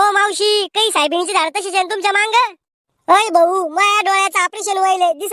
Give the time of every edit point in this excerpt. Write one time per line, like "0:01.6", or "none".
none